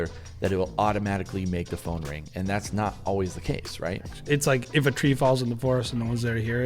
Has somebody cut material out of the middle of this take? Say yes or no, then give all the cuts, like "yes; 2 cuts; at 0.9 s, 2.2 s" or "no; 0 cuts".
yes; 1 cut; at 4.1 s